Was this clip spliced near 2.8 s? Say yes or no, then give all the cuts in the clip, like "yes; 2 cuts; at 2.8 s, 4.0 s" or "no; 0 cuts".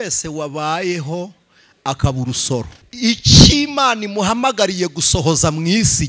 yes; 1 cut; at 2.8 s